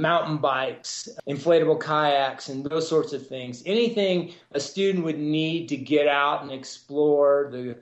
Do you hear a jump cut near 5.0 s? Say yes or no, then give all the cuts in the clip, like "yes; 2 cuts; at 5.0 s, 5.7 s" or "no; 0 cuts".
no; 1 cut; at 1.0 s